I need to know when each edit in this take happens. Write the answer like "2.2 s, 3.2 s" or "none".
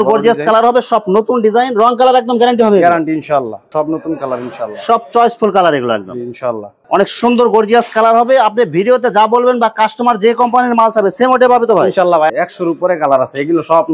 3.7 s, 6.8 s, 12.3 s